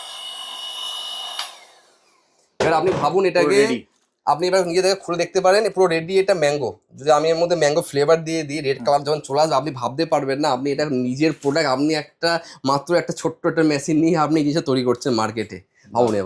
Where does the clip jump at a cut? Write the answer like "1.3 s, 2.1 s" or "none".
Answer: none